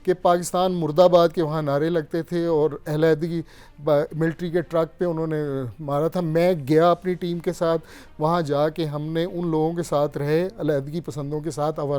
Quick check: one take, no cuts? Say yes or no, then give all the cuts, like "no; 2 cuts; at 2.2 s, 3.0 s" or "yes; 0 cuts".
yes; 0 cuts